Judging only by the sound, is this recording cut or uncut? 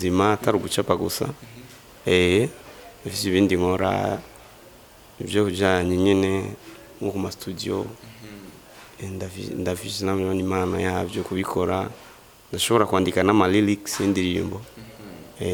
uncut